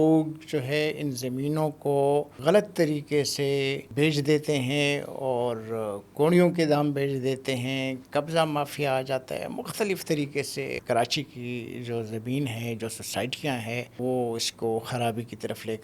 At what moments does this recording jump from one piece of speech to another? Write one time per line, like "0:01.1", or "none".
0:02.3
0:03.9
0:10.8
0:13.9

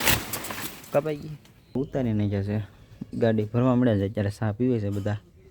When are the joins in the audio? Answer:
0:01.8

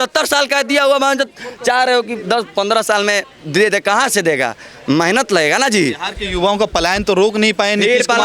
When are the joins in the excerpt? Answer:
none

